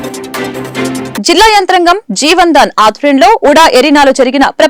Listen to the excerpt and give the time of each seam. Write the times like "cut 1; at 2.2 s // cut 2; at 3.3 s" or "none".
none